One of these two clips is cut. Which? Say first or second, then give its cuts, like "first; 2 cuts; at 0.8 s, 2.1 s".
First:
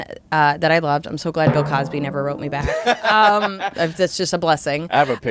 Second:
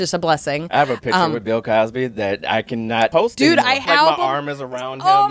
second; 2 cuts; at 3.1 s, 3.8 s